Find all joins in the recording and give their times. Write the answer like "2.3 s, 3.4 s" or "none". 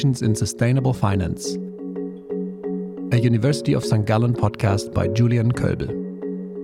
none